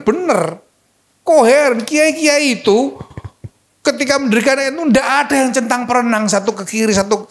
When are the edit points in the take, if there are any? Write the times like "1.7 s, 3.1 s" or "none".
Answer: none